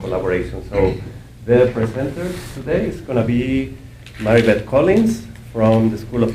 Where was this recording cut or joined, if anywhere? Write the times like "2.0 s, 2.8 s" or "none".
1.4 s